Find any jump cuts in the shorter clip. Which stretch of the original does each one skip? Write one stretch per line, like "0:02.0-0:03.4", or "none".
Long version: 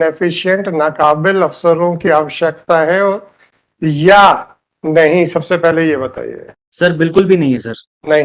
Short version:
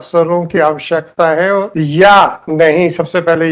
0:03.2-0:03.8
0:04.5-0:04.8